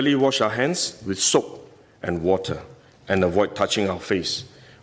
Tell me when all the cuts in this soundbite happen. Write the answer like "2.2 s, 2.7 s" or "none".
none